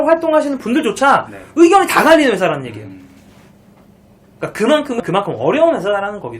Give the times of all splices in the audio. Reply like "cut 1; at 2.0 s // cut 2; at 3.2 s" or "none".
cut 1; at 5.0 s